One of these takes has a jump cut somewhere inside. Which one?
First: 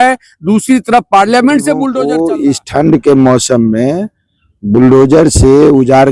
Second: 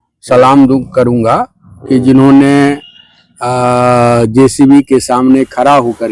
first; 1 cut; at 1.9 s

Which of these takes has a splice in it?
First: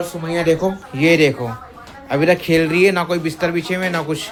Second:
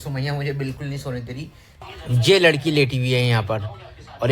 second; 1 cut; at 1.8 s

